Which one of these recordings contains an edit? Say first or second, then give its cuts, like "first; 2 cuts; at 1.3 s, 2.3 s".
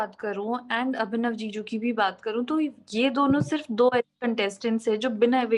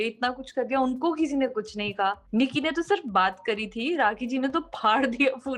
second; 1 cut; at 2.2 s